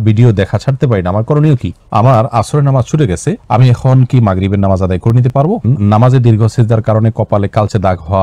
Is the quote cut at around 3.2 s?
no; 2 cuts; at 1.8 s, 5.6 s

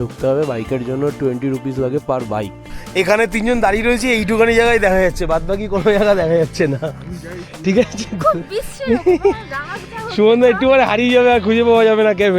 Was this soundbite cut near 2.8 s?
yes; 1 cut; at 2.8 s

